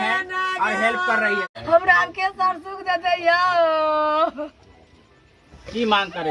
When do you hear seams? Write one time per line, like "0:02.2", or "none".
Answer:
0:01.5